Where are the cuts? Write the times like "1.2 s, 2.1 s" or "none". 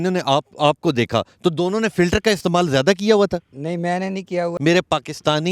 4.5 s